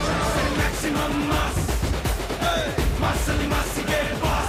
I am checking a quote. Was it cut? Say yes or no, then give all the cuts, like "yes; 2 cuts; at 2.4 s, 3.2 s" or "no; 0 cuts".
no; 0 cuts